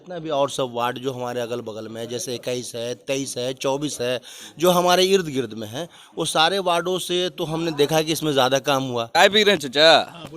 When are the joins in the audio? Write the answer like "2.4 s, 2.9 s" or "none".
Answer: 9.1 s